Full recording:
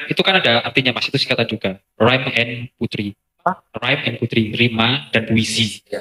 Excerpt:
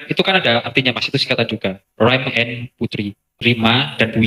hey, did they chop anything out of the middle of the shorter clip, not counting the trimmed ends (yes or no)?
yes